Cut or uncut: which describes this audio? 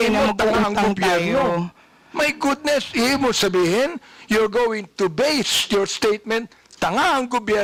uncut